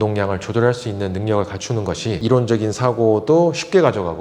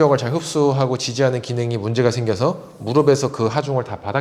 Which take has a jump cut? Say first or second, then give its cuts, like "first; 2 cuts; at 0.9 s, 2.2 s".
first; 1 cut; at 2.2 s